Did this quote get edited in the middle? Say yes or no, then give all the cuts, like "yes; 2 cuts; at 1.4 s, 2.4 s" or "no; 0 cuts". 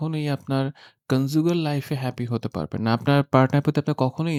no; 0 cuts